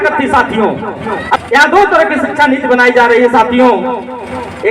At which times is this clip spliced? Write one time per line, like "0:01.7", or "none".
0:01.4

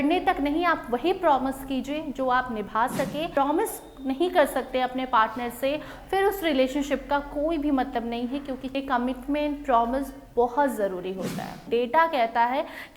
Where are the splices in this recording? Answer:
0:03.3
0:08.8
0:11.6

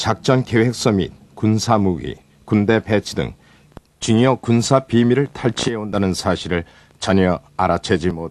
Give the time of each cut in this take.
0:02.3

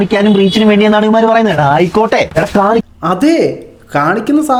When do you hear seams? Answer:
none

